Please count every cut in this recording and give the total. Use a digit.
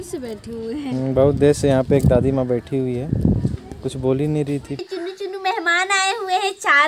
1